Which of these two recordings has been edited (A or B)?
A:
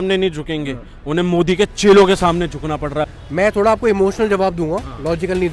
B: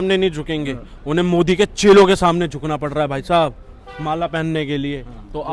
A